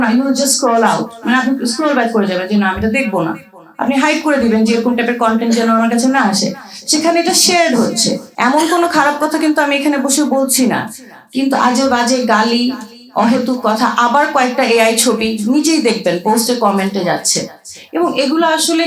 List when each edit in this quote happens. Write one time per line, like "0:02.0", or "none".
0:08.3